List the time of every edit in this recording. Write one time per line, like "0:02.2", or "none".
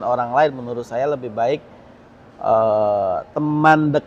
none